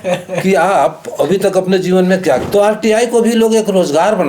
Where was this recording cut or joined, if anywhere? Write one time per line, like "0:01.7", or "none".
0:02.4